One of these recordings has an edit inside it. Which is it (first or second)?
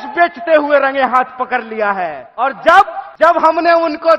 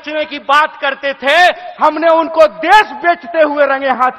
first